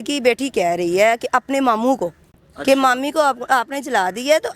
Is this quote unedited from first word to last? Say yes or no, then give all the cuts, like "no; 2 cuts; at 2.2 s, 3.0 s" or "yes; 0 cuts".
yes; 0 cuts